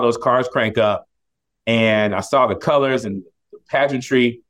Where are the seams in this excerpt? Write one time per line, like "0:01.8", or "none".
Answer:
none